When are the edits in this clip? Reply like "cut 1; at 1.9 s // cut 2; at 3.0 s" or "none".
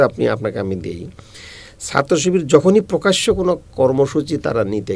none